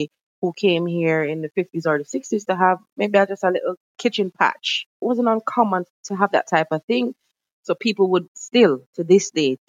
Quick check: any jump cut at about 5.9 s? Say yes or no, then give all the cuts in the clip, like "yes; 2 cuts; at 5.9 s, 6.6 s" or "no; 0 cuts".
yes; 4 cuts; at 3.9 s, 5.0 s, 5.9 s, 7.1 s